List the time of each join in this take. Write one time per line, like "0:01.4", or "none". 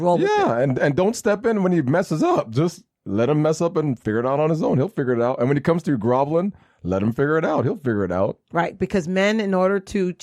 none